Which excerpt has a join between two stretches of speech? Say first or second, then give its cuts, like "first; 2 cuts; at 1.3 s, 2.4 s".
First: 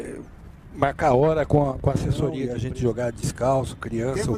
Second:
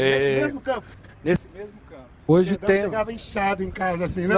first; 1 cut; at 2.5 s